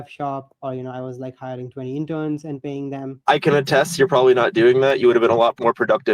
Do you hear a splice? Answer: no; 0 cuts

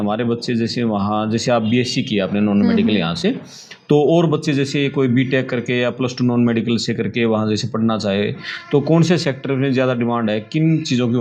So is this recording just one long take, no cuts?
yes; 0 cuts

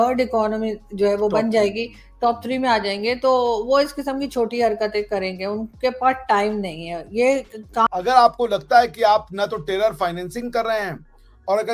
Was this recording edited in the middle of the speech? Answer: yes; 1 cut; at 7.9 s

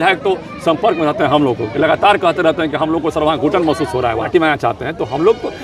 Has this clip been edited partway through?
yes; 1 cut; at 4.3 s

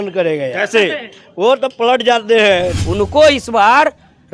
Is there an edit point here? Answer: yes; 1 cut; at 2.8 s

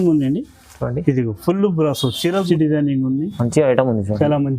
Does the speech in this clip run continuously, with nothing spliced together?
no; 1 cut; at 2.4 s

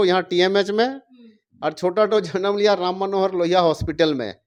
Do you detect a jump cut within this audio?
no; 0 cuts

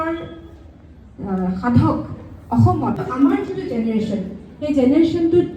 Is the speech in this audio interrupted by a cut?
yes; 1 cut; at 3.0 s

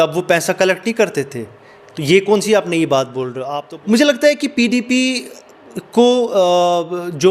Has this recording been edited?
yes; 1 cut; at 3.4 s

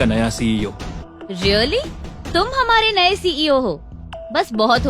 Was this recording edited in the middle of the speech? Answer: yes; 1 cut; at 1.0 s

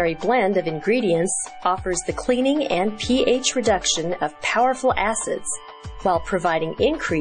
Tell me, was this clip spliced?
no; 0 cuts

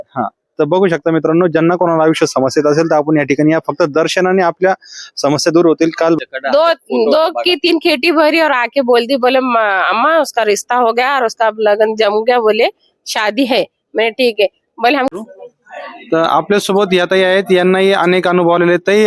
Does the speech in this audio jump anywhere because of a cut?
yes; 2 cuts; at 6.2 s, 15.1 s

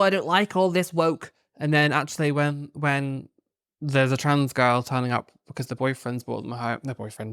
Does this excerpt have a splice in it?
no; 0 cuts

